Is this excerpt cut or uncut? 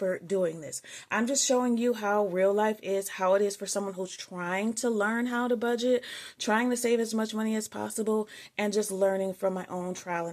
uncut